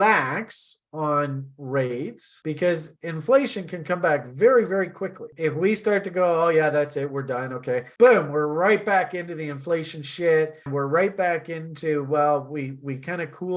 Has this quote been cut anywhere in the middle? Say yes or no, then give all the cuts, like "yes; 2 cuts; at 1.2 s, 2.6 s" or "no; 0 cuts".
yes; 1 cut; at 10.7 s